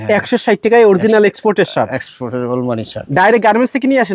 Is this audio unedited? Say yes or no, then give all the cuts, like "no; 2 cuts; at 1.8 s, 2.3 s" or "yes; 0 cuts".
yes; 0 cuts